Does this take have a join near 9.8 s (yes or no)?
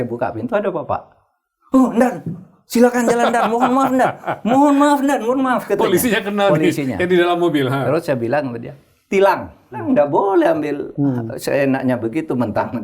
yes